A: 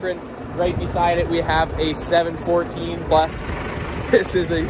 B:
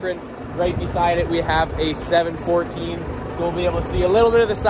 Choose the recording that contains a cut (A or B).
A